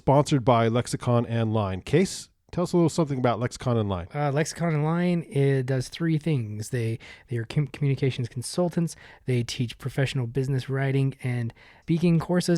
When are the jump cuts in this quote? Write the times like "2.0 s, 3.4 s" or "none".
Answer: none